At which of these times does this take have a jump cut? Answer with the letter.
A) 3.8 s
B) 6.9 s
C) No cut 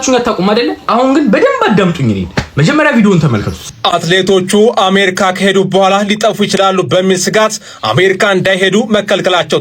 A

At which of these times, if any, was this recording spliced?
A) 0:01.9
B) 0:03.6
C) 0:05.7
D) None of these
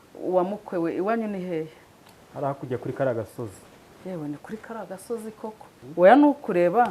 C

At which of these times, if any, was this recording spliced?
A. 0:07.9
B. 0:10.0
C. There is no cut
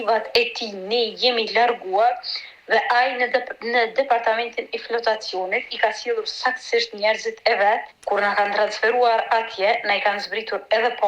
A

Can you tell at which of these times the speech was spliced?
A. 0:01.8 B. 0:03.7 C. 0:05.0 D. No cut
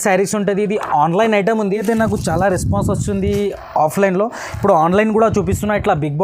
A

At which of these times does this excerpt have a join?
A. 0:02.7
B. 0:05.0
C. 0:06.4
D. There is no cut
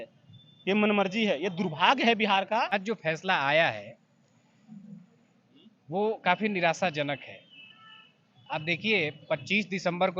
A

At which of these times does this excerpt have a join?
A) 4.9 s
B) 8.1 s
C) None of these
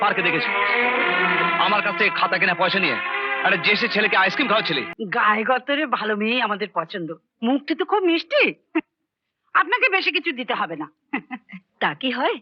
A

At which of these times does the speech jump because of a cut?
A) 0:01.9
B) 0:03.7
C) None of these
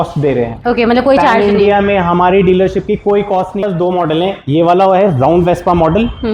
B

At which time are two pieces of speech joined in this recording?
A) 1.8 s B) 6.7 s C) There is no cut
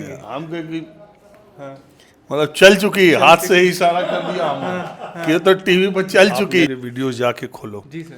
B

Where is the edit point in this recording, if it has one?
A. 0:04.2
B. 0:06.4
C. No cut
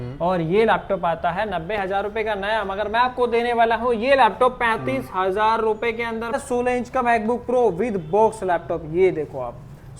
B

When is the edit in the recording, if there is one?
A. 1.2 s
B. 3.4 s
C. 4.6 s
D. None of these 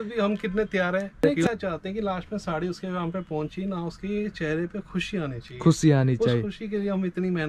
A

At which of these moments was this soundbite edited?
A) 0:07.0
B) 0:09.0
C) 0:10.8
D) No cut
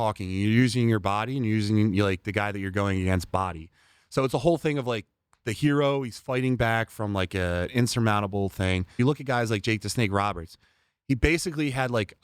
B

